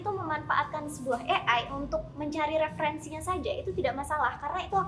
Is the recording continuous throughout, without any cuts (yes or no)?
yes